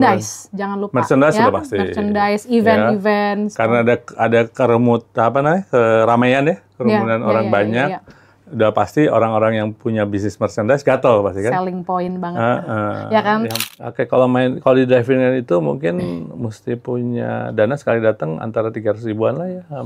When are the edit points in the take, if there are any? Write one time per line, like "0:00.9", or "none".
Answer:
0:13.6